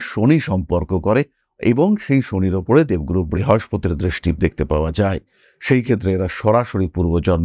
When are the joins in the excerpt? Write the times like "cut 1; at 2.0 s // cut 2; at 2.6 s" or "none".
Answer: none